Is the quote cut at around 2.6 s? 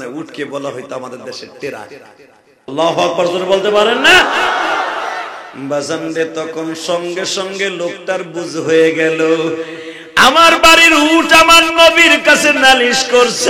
yes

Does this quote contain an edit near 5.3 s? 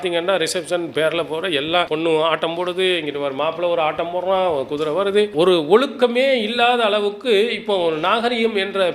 yes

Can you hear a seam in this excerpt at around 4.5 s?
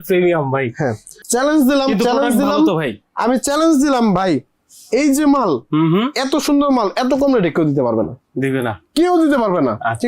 no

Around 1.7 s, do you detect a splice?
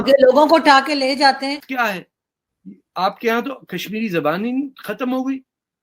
yes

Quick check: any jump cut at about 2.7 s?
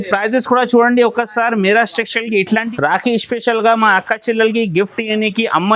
yes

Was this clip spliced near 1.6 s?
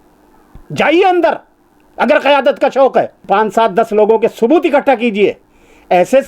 no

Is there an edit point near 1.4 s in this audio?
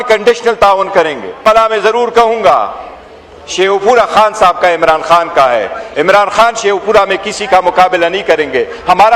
yes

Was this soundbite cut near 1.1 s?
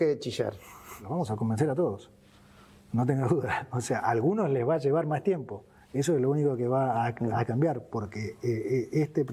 yes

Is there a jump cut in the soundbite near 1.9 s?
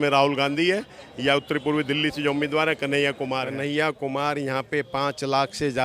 no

